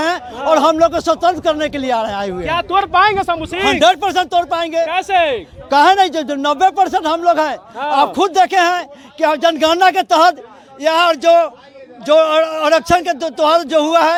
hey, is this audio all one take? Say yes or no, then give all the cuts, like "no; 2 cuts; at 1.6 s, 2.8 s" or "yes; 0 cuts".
yes; 0 cuts